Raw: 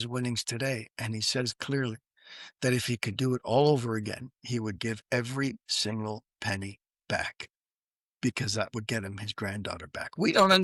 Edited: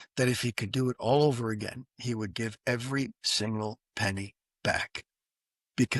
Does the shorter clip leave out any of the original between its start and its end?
no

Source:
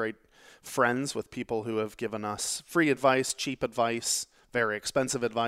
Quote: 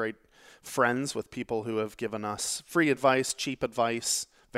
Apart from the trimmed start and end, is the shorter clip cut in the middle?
no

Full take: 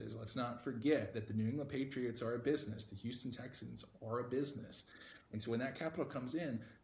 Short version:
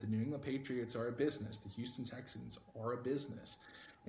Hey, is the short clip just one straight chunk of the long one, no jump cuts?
yes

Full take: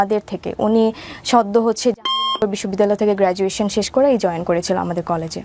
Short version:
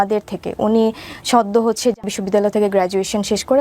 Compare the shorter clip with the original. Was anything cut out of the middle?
yes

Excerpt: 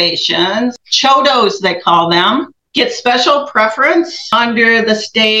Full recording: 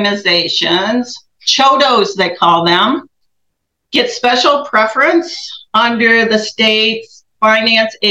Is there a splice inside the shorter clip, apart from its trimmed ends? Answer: yes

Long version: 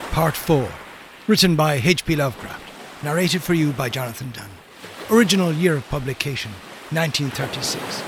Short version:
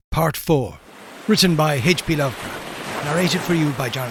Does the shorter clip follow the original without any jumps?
yes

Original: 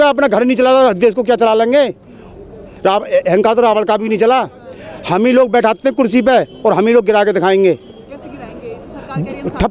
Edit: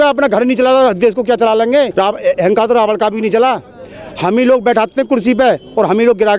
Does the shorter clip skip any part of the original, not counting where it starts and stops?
yes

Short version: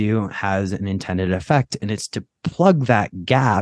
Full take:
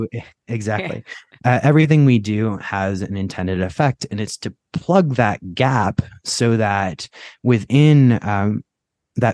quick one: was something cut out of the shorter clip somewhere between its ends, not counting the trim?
no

